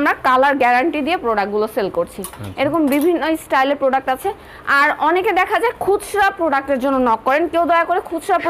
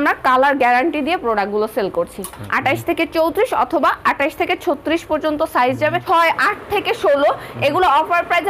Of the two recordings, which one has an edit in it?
second; 2 cuts; at 2.4 s, 6.0 s

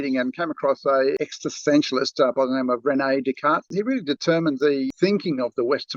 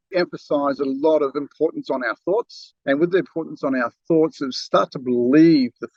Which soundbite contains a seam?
first; 3 cuts; at 1.2 s, 3.6 s, 4.9 s

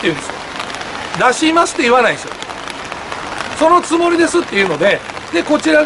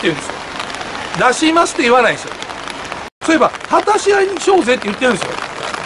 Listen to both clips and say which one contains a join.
second; 1 cut; at 3.1 s

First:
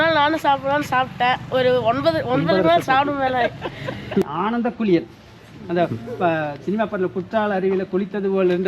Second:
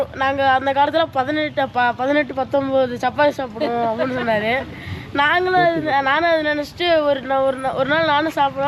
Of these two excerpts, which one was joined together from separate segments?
first; 1 cut; at 4.2 s

